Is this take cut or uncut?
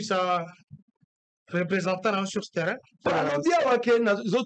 cut